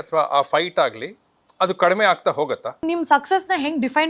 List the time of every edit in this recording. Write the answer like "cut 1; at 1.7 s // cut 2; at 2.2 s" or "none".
cut 1; at 2.8 s